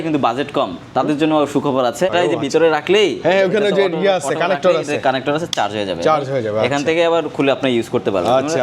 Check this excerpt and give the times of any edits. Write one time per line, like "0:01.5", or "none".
0:02.1

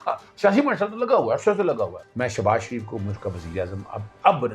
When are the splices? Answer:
0:02.0

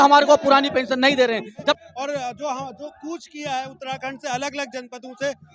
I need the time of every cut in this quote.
0:01.8

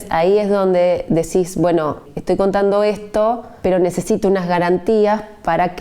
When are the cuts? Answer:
0:02.1
0:03.5

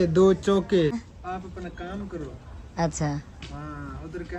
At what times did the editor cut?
0:01.0

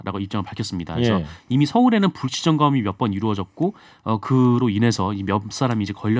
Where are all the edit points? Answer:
none

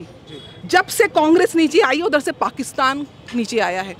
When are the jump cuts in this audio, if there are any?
none

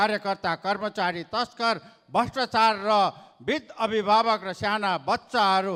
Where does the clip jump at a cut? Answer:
none

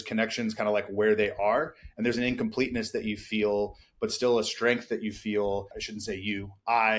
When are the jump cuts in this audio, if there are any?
0:05.8

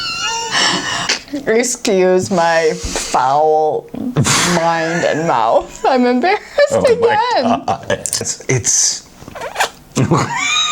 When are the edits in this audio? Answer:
0:01.0
0:08.3

